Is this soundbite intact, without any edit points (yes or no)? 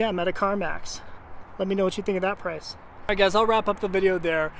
yes